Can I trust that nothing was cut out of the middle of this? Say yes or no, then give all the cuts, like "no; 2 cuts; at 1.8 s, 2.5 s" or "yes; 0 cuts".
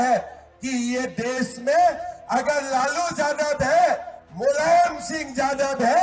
yes; 0 cuts